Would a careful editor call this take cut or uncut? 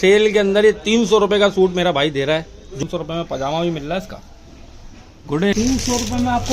cut